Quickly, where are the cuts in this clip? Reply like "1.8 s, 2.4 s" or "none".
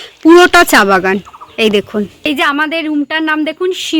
2.2 s